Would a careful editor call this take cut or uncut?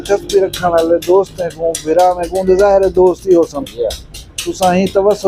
uncut